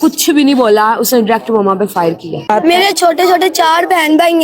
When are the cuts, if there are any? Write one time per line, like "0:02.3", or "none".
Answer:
0:02.5